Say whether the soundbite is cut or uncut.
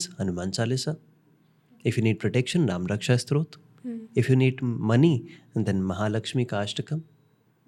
uncut